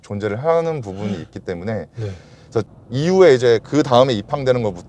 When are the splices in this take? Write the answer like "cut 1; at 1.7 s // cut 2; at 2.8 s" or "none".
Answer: cut 1; at 2.6 s